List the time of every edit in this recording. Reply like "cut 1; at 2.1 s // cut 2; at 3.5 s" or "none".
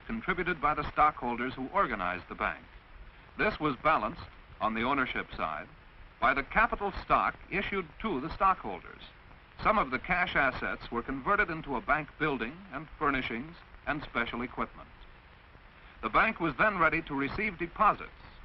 cut 1; at 2.5 s